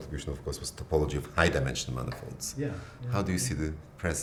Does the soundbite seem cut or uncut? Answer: uncut